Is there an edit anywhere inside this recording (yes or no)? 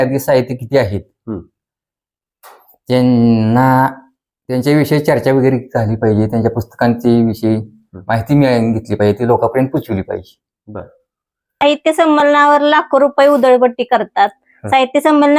yes